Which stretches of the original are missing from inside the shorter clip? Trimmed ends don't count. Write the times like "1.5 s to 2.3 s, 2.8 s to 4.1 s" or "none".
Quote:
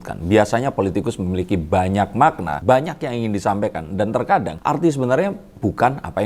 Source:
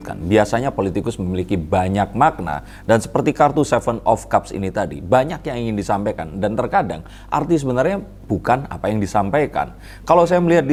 2.5 s to 5.0 s, 7.0 s to 7.2 s